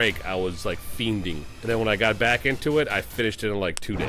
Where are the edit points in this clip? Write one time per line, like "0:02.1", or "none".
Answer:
0:01.5

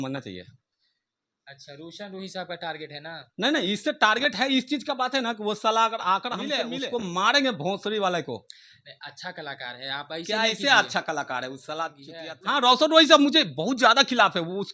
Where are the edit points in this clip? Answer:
0:06.6
0:12.1

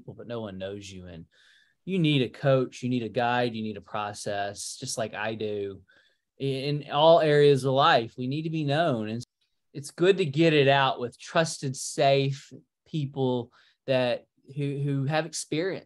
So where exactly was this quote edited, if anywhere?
0:09.2

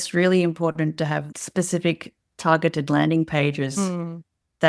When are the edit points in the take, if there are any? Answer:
0:01.4

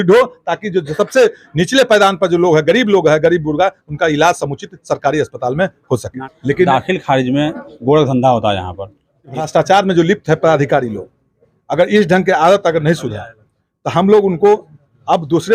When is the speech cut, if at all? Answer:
0:06.1
0:09.4

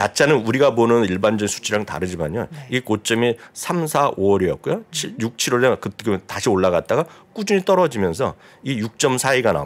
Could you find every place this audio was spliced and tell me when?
none

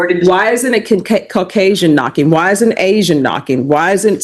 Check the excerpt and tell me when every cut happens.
none

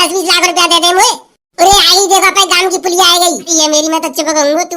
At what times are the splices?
0:03.5

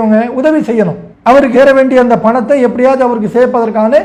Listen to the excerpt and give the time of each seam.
none

